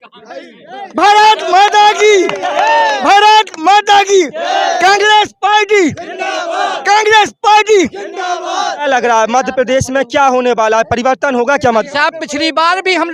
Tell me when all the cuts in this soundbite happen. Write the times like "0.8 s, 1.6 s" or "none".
8.8 s